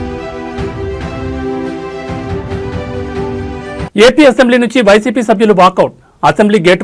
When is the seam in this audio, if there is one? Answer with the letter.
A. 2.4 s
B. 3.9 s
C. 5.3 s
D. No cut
B